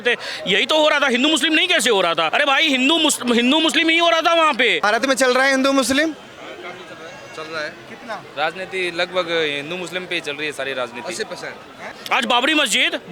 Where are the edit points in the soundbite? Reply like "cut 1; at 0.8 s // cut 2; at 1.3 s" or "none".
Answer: cut 1; at 2.3 s // cut 2; at 4.8 s // cut 3; at 12.0 s